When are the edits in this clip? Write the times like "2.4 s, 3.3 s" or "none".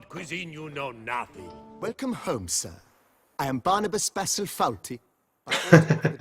1.8 s